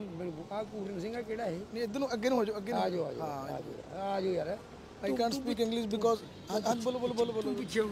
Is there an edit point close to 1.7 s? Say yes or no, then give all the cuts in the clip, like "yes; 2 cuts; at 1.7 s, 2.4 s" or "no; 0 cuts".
no; 0 cuts